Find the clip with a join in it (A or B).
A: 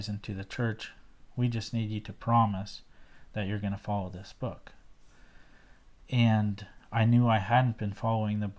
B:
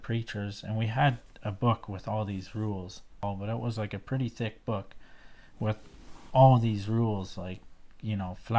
B